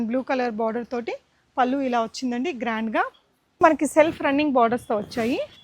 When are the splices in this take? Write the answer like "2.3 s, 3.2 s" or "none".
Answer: 3.6 s